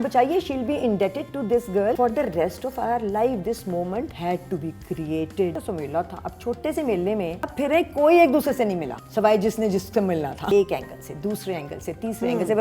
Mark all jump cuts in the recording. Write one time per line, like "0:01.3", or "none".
0:02.0
0:04.1
0:05.5
0:07.5
0:09.0
0:10.5